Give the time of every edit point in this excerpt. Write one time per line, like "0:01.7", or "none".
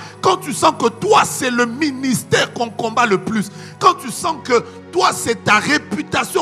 none